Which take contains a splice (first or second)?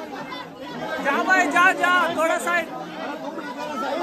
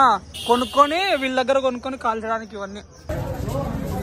second